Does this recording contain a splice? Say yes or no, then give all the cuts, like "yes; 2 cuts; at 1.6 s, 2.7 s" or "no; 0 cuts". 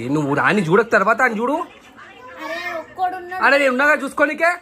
no; 0 cuts